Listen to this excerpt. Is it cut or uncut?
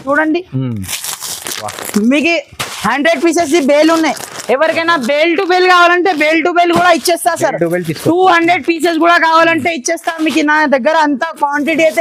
uncut